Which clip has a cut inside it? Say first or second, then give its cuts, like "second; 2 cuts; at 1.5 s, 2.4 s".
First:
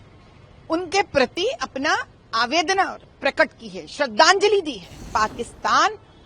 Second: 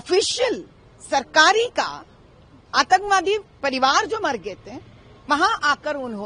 first; 1 cut; at 5.1 s